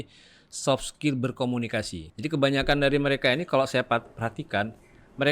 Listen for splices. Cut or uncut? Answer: cut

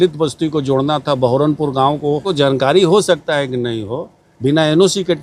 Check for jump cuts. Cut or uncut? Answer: cut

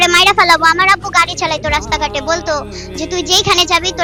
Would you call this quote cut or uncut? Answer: uncut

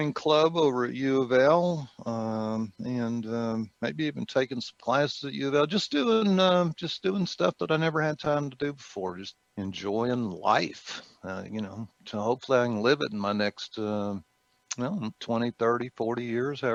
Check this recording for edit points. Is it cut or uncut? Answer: uncut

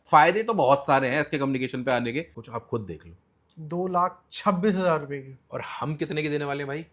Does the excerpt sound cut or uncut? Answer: cut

